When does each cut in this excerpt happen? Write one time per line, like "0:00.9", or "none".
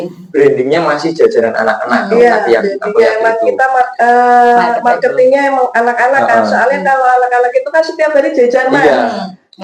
none

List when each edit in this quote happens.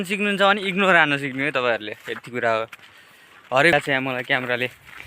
0:03.7

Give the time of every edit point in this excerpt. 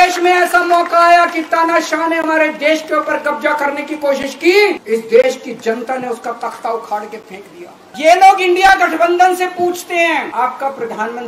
0:04.8
0:07.8
0:10.3

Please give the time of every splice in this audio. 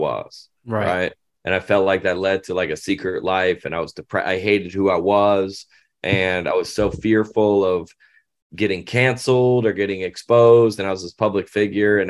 none

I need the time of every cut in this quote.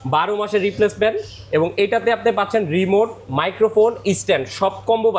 none

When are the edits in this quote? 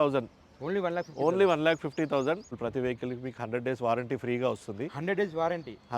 0:02.6

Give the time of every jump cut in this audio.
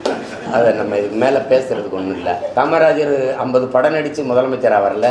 0:02.4

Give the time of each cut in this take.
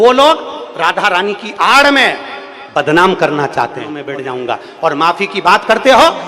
0:04.0

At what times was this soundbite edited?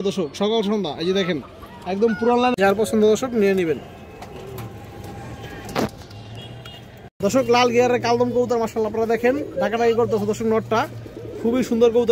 0:02.7
0:07.2

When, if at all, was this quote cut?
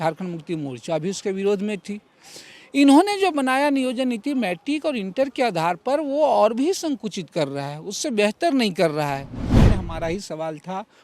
0:09.5

